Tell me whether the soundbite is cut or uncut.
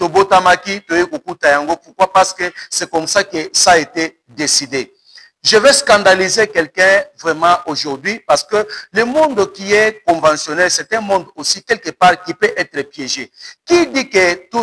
uncut